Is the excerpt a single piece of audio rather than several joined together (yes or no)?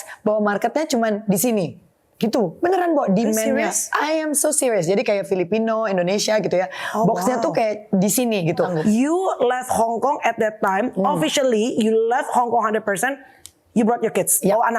no